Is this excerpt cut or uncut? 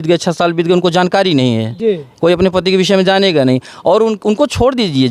uncut